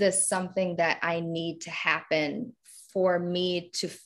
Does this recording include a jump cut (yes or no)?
no